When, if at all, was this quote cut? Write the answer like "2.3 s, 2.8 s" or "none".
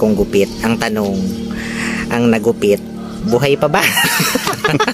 none